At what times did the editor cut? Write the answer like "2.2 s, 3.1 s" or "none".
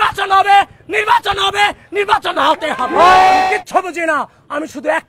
3.5 s